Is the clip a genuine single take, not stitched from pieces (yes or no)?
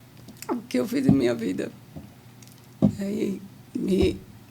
yes